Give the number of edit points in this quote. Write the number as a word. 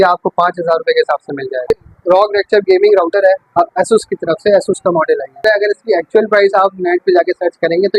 two